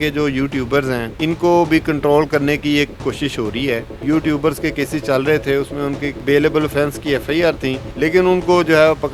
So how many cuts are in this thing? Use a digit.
4